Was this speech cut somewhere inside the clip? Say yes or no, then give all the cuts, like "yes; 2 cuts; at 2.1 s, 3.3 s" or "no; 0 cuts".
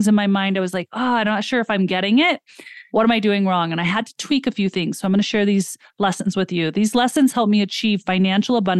yes; 1 cut; at 2.8 s